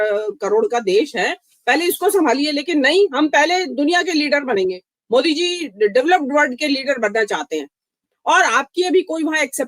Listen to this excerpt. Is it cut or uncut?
uncut